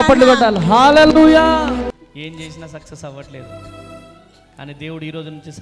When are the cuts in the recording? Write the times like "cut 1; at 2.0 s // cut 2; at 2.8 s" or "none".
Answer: cut 1; at 1.9 s